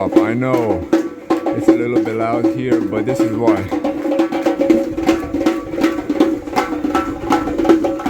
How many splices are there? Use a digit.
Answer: 0